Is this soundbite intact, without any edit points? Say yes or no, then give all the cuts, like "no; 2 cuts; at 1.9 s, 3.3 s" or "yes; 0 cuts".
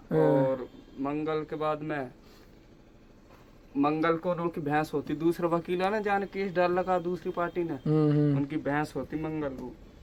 yes; 0 cuts